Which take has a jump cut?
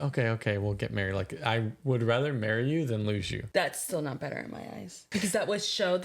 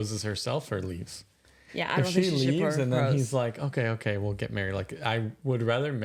first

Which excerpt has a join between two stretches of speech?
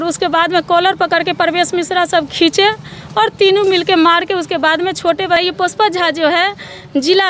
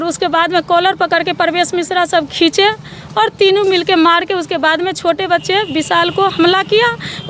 first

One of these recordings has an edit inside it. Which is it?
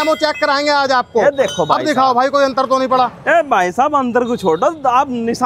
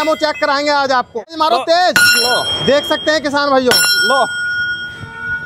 second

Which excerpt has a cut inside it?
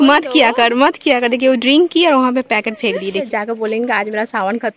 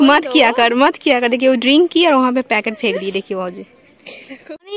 first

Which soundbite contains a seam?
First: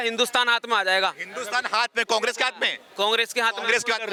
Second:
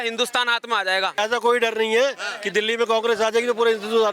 second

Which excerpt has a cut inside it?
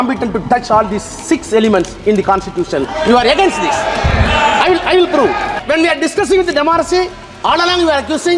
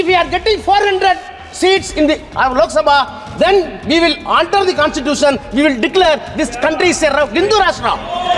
first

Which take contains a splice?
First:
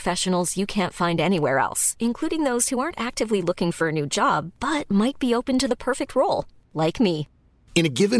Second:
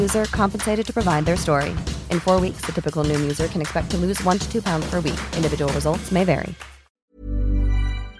second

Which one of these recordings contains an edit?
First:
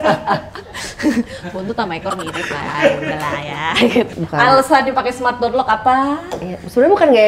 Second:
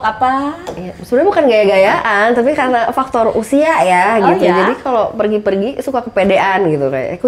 first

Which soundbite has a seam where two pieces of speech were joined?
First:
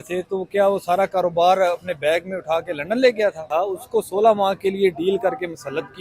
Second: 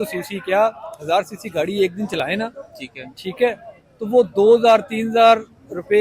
first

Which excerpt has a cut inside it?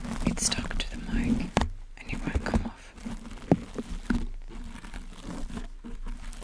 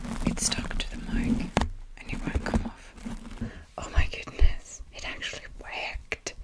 second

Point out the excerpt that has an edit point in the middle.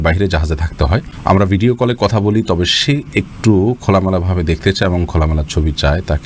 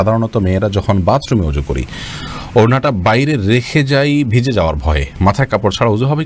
first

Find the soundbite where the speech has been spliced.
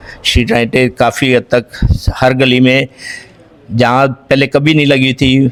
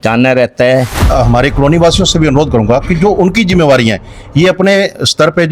second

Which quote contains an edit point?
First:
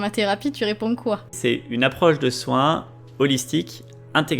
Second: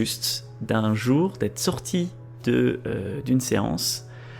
first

